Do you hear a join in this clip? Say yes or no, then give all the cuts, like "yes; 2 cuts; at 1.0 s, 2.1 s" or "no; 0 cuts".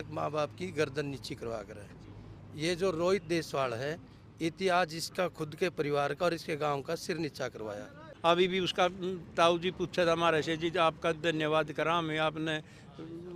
yes; 1 cut; at 8.1 s